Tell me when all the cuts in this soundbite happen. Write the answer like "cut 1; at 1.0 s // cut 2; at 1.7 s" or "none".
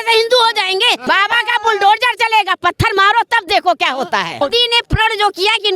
cut 1; at 1.0 s // cut 2; at 4.4 s